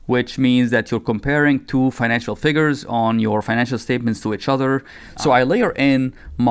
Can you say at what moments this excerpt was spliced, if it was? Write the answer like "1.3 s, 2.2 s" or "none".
5.0 s